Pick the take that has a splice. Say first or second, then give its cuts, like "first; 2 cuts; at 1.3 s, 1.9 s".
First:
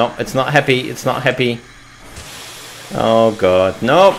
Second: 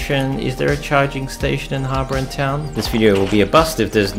second; 1 cut; at 2.7 s